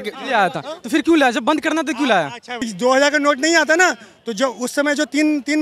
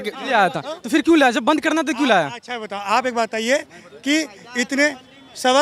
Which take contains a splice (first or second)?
first